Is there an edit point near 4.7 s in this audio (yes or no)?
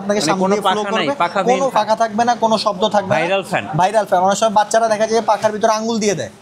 no